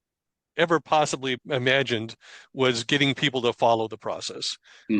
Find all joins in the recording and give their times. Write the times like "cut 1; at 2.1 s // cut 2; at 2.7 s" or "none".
cut 1; at 1.4 s